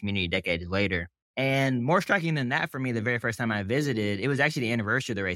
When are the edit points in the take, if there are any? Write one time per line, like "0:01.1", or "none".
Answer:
0:01.2